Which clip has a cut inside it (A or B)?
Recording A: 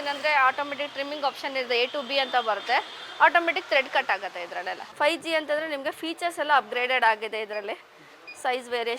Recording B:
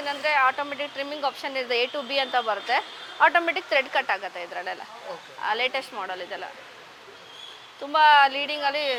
A